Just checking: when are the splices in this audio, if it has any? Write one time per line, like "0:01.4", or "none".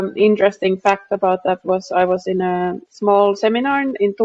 0:02.9